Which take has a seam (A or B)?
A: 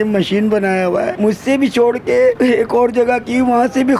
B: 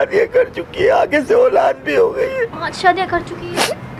A